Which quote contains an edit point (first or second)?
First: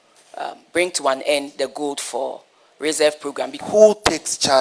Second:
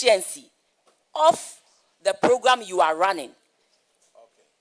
first